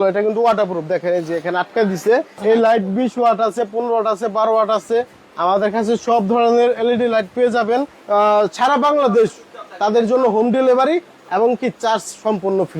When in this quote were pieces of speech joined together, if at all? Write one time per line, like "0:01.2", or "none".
0:02.4
0:08.0